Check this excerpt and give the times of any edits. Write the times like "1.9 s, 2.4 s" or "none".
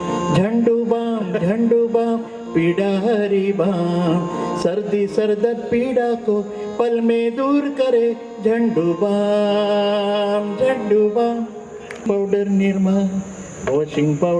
12.1 s